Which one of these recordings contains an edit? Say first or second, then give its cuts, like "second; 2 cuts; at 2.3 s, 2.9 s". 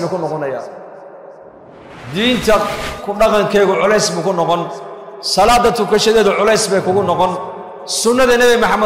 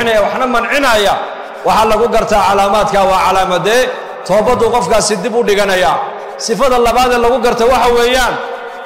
first; 1 cut; at 1.9 s